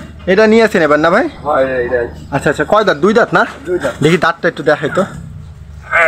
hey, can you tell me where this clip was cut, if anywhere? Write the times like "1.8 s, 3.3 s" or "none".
none